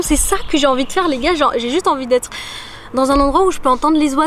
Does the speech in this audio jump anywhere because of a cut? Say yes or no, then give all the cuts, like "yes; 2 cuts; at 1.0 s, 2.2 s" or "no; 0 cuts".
no; 0 cuts